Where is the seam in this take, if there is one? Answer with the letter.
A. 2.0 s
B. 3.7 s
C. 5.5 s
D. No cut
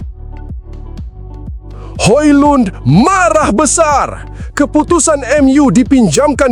A